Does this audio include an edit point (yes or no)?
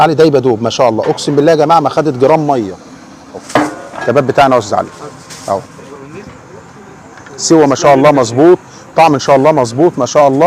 yes